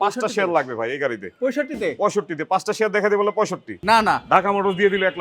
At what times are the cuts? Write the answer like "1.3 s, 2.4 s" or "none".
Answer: 3.7 s